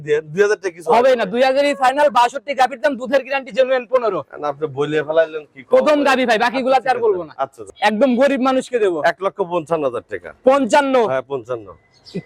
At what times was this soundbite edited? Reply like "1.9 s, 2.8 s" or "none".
7.6 s